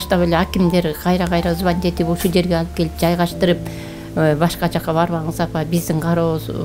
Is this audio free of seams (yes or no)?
yes